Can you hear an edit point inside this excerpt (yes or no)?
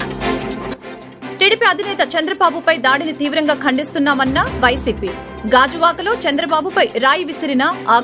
yes